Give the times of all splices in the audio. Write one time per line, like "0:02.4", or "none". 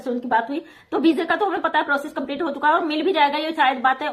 none